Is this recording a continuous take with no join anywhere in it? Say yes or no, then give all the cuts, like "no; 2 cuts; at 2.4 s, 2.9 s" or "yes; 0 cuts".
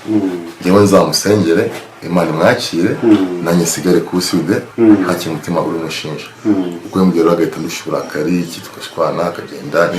no; 1 cut; at 4.7 s